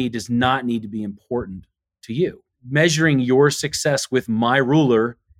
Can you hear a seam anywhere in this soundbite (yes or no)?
yes